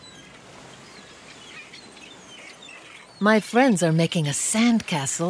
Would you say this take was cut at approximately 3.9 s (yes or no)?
yes